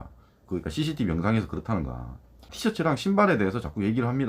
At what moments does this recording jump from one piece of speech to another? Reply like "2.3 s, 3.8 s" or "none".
2.5 s